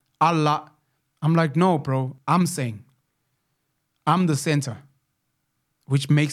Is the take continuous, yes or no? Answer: no